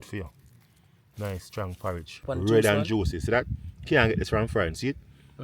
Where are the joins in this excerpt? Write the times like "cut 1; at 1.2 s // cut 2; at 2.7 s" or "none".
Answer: cut 1; at 2.2 s